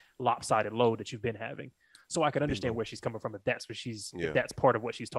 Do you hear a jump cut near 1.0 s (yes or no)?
no